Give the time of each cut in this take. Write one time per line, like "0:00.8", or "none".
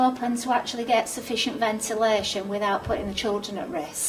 none